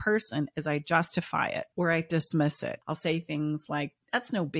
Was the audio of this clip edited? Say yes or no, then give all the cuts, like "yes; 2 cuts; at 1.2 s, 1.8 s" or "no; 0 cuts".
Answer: yes; 2 cuts; at 1.7 s, 2.8 s